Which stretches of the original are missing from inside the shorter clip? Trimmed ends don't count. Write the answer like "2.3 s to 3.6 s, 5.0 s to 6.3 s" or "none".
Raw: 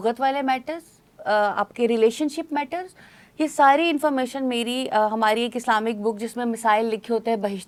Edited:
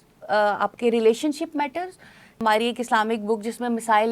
3.3 s to 5.1 s